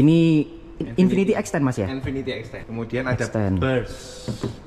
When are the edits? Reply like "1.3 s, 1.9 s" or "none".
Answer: 2.5 s